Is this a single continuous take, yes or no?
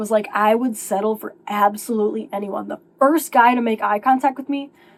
yes